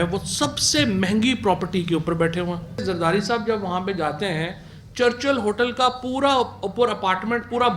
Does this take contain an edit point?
yes; 1 cut; at 2.8 s

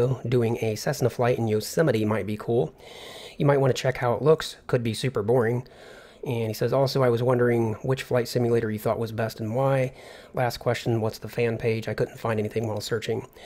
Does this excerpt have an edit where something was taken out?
no; 0 cuts

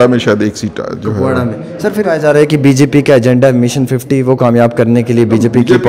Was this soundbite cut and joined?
yes; 1 cut; at 1.8 s

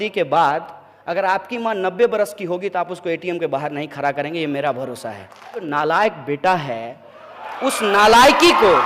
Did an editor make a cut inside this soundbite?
yes; 1 cut; at 5.7 s

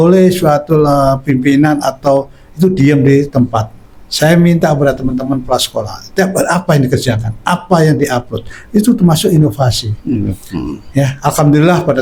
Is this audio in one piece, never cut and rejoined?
yes; 0 cuts

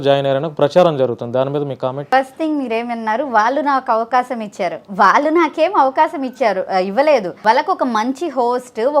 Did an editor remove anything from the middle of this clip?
yes; 2 cuts; at 2.0 s, 7.3 s

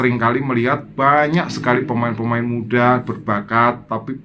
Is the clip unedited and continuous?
yes; 0 cuts

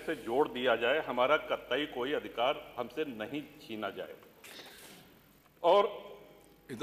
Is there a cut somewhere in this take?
no; 0 cuts

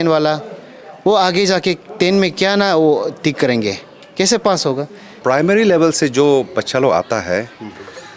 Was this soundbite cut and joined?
yes; 1 cut; at 5.1 s

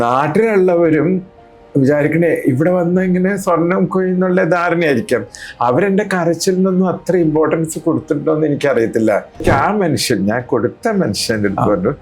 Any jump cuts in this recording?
yes; 1 cut; at 9.4 s

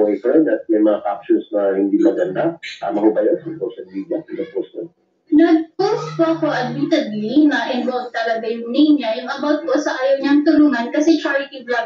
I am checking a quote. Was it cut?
no; 0 cuts

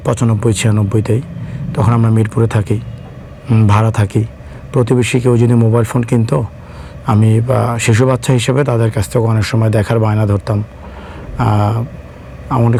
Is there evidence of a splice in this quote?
no; 0 cuts

